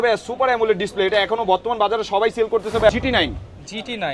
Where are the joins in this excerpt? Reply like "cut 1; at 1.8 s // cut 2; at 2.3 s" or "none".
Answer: cut 1; at 2.9 s